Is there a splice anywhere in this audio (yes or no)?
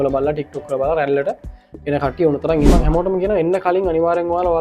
yes